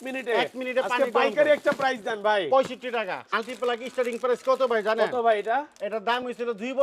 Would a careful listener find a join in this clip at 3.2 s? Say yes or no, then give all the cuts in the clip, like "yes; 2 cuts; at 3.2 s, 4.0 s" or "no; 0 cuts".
yes; 1 cut; at 3.2 s